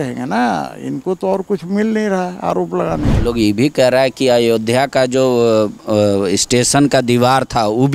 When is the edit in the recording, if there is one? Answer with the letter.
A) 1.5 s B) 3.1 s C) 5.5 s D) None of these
B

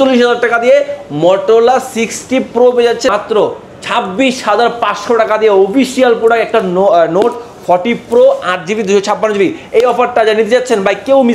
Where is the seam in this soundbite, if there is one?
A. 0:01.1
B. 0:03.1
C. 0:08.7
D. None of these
B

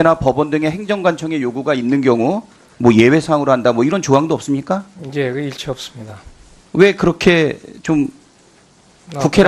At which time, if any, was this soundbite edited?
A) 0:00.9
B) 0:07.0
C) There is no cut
B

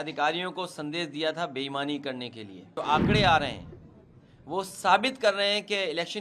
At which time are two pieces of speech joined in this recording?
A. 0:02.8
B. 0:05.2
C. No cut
A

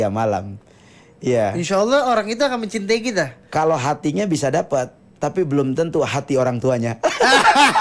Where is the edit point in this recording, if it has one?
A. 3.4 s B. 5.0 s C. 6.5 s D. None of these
D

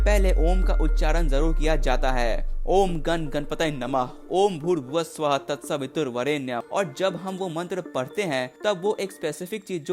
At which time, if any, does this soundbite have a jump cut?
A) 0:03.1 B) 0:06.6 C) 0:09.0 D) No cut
B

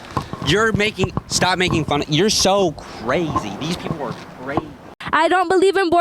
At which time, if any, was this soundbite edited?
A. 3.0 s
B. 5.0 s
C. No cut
B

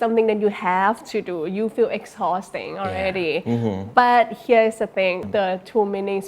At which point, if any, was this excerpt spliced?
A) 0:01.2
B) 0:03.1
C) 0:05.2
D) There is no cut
C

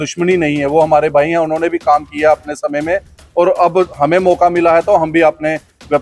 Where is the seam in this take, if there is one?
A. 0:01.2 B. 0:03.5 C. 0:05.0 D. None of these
D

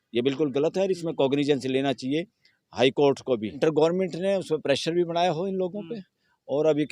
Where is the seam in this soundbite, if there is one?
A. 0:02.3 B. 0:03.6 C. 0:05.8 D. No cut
B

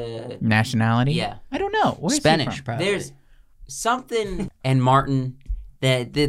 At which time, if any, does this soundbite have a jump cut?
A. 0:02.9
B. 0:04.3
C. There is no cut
B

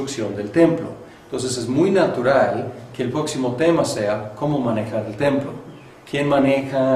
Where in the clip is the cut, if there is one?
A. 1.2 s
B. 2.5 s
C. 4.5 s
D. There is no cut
B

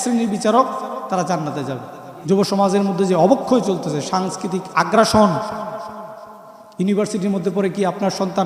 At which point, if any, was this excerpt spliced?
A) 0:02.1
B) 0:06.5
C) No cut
A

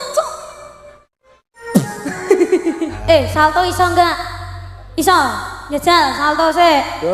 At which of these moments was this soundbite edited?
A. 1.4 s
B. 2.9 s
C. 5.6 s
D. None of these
B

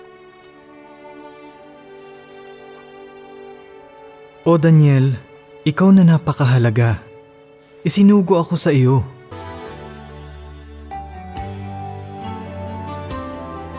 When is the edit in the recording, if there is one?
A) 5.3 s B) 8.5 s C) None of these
C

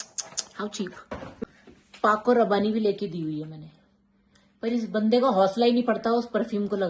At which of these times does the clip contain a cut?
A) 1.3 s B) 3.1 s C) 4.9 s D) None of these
A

